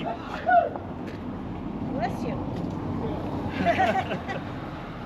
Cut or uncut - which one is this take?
uncut